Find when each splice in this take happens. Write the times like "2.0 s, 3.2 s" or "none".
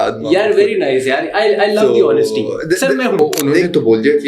3.2 s